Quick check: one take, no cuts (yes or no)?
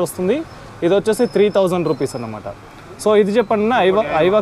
yes